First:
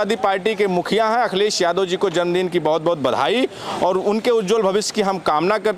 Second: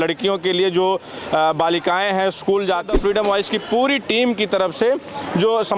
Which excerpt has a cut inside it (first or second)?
second